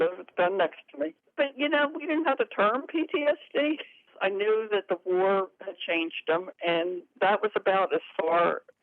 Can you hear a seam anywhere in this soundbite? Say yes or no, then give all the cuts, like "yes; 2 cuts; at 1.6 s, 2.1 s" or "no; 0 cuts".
yes; 2 cuts; at 1.3 s, 4.0 s